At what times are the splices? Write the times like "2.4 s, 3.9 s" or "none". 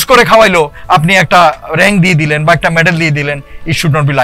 none